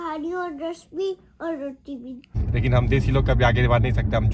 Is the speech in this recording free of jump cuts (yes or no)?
no